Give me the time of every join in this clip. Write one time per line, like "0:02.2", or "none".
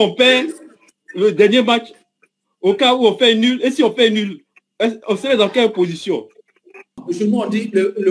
0:07.0